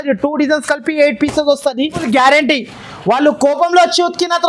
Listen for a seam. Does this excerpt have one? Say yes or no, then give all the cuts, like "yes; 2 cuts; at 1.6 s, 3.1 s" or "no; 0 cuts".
yes; 1 cut; at 2.0 s